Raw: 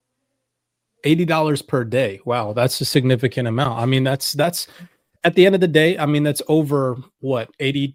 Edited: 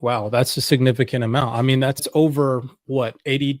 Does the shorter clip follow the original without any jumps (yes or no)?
no